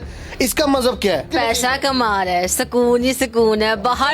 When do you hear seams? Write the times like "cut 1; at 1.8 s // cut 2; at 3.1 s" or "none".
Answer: cut 1; at 1.3 s